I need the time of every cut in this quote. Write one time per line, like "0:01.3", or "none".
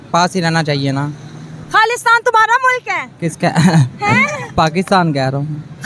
none